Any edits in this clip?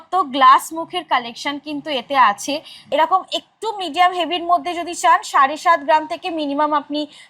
yes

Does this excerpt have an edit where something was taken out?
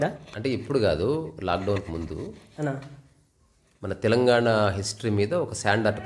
no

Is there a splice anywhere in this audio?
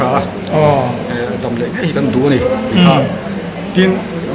no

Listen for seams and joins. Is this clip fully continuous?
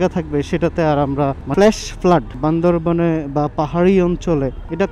no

